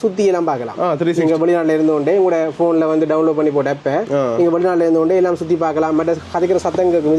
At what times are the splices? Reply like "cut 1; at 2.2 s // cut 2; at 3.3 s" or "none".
none